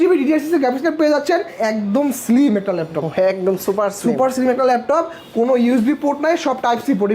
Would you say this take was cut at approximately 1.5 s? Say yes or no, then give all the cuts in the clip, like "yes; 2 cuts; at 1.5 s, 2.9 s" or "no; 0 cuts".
yes; 1 cut; at 1.5 s